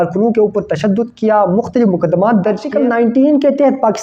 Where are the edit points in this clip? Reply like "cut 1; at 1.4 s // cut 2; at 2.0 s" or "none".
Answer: cut 1; at 2.7 s